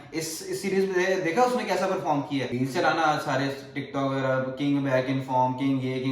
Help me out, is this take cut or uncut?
cut